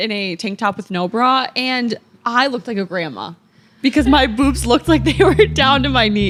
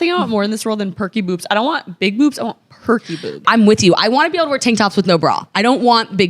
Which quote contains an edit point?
second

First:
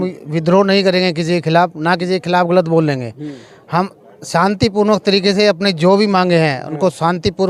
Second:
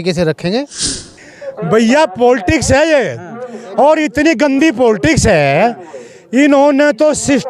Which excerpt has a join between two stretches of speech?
second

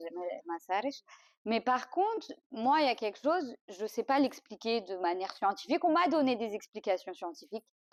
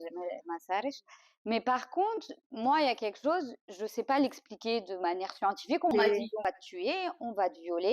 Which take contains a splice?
second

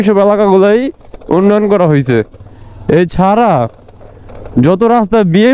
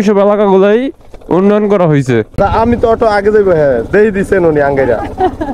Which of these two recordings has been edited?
second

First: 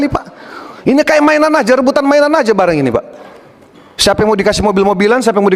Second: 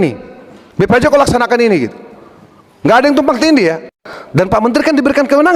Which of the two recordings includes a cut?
second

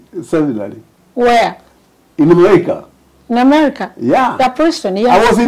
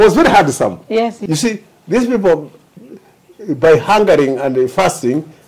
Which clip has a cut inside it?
second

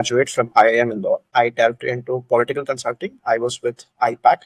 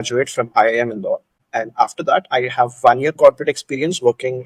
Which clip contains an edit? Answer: first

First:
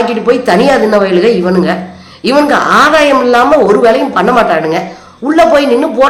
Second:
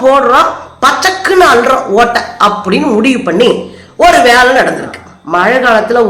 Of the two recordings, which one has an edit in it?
second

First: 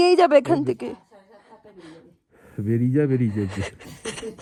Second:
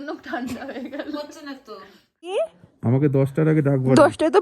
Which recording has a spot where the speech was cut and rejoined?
second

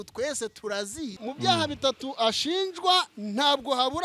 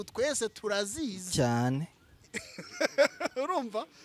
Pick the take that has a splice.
first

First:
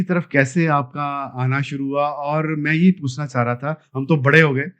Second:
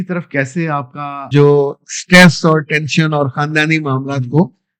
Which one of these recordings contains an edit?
second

